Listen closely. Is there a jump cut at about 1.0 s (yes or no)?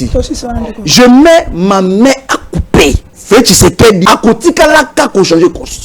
no